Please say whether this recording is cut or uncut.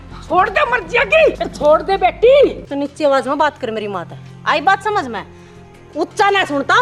cut